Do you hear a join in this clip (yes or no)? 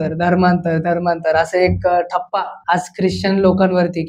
yes